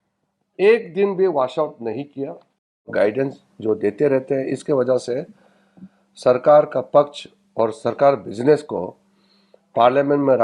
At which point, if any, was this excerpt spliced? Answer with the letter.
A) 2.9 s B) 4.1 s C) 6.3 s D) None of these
A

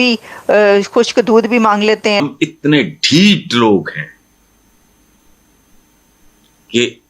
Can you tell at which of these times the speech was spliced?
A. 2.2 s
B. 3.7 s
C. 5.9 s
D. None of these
A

